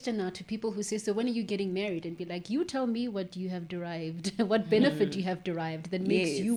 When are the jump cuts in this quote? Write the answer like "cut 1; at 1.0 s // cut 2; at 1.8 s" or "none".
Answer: none